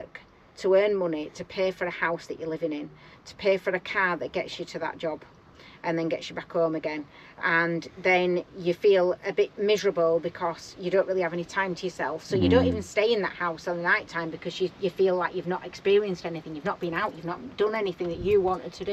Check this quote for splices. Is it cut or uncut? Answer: uncut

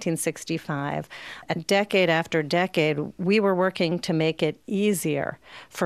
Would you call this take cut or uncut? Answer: cut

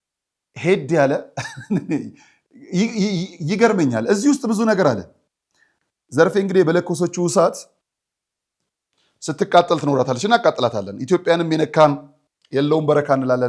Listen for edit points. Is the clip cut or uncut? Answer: uncut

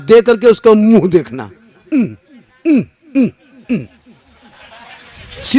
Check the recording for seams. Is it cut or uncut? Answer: uncut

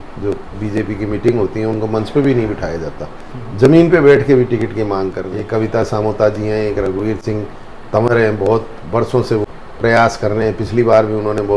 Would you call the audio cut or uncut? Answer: cut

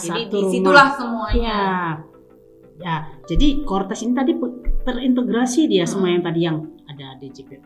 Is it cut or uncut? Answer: uncut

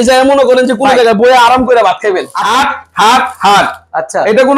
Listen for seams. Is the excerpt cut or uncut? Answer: cut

